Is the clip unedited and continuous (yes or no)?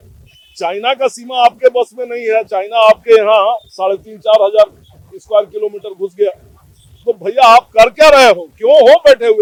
yes